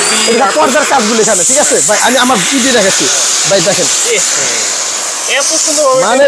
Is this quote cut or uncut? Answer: uncut